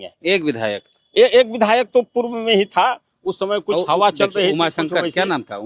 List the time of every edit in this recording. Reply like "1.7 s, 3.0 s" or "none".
none

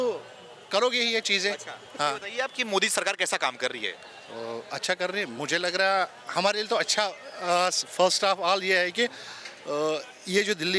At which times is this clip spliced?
none

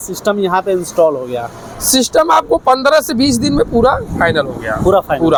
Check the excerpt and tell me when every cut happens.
none

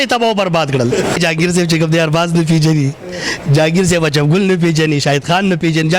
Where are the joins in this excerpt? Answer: 1.2 s

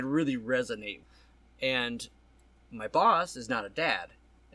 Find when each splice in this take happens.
none

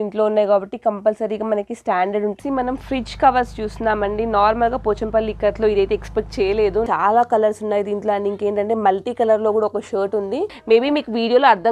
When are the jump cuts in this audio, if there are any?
2.4 s, 6.9 s, 10.5 s

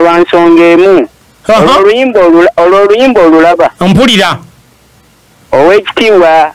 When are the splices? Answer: none

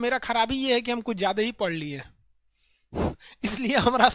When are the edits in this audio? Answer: none

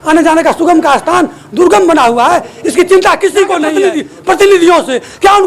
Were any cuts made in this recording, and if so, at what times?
3.7 s

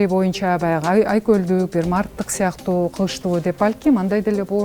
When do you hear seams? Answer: none

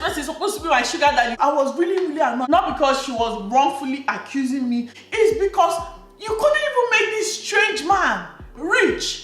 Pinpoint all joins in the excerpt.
1.3 s

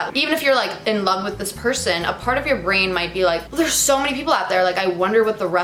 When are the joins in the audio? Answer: none

